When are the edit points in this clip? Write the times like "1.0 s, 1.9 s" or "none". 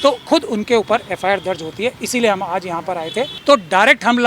3.3 s